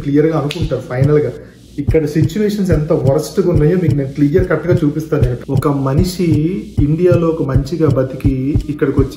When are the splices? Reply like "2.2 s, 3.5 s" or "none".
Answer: 1.5 s, 5.3 s